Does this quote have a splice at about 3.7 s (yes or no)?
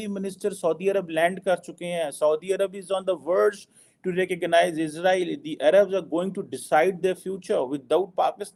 no